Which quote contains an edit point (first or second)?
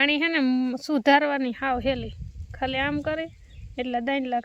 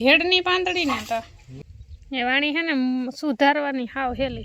second